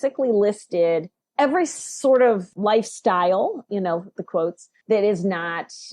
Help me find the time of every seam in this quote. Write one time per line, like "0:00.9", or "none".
0:01.2
0:02.5
0:04.7